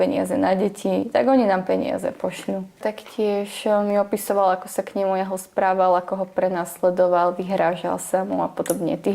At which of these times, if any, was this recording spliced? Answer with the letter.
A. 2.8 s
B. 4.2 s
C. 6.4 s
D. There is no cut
A